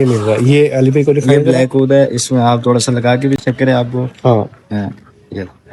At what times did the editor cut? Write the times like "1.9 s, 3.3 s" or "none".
none